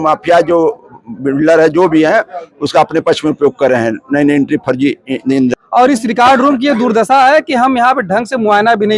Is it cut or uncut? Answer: cut